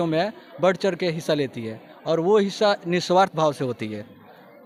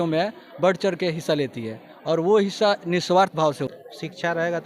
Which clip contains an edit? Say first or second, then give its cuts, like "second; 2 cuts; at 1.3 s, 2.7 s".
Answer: second; 1 cut; at 3.7 s